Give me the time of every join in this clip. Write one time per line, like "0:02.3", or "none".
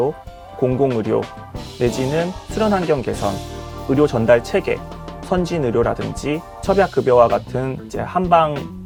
none